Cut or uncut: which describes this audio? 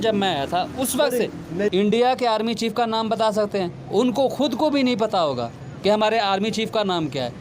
cut